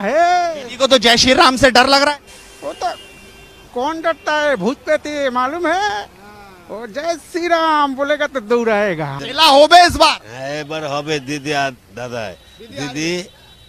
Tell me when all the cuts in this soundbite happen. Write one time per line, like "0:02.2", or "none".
0:09.2